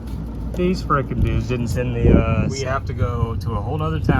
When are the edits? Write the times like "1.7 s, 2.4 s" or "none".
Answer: 2.6 s